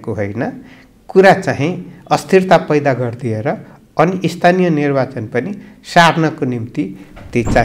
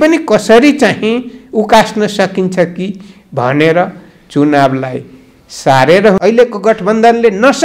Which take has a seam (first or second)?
second